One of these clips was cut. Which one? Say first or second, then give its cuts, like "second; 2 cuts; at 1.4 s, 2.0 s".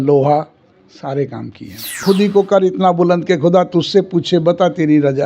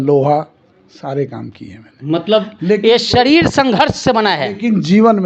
first; 1 cut; at 2.0 s